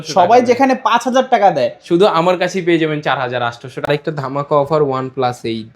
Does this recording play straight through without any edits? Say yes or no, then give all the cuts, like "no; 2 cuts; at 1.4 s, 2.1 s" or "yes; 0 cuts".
no; 1 cut; at 3.9 s